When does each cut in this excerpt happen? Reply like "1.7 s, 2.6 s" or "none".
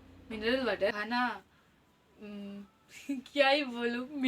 0.9 s